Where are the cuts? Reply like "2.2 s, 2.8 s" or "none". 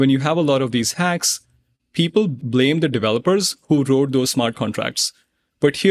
2.4 s